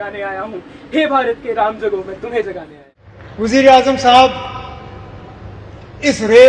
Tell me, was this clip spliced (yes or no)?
yes